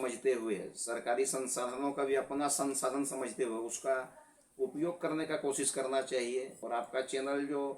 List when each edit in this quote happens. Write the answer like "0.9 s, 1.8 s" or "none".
6.6 s